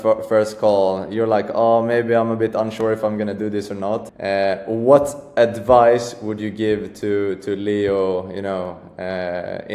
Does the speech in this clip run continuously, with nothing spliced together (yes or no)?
no